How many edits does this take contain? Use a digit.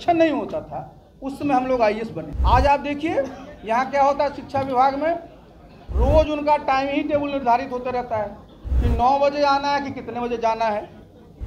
1